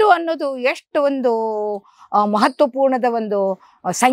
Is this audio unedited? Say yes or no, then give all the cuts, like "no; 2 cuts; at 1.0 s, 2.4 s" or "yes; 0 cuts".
yes; 0 cuts